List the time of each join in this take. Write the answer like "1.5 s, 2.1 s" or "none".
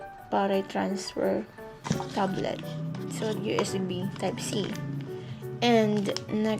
1.8 s